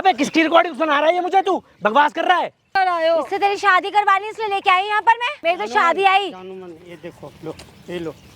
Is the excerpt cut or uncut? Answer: cut